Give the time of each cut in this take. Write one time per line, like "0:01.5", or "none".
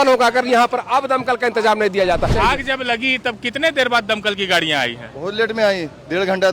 0:02.3